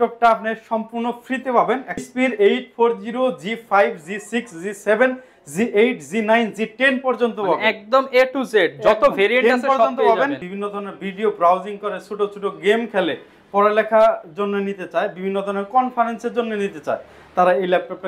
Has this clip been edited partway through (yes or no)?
yes